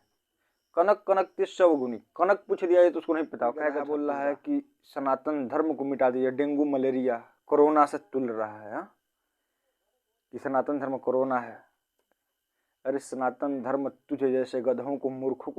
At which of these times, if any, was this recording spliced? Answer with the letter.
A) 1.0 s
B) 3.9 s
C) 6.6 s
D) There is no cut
B